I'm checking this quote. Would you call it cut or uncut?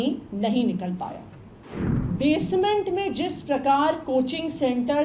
cut